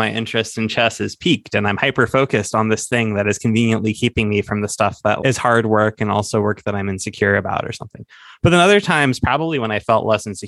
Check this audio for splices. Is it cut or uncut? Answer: uncut